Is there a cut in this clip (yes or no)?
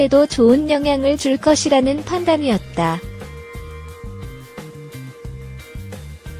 yes